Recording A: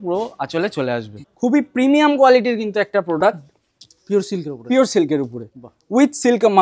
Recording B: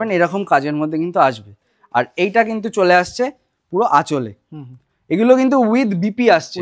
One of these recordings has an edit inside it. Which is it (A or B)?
A